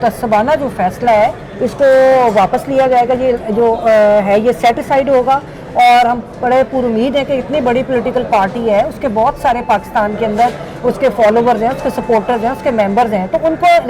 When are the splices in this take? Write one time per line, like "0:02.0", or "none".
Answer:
none

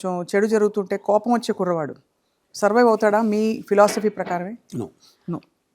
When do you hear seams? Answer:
none

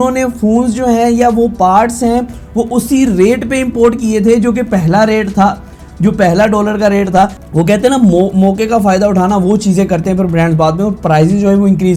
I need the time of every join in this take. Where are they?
none

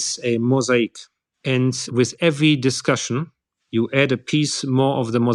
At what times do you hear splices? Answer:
none

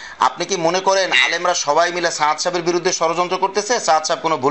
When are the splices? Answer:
none

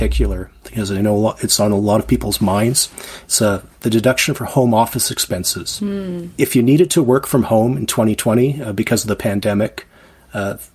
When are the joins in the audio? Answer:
0:06.2

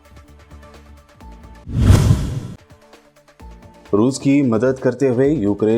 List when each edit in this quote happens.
0:01.1

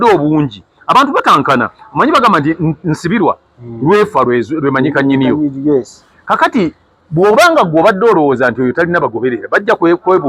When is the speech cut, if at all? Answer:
none

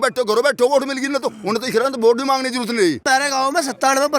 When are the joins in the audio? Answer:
0:03.0

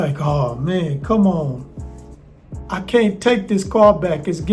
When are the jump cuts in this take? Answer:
none

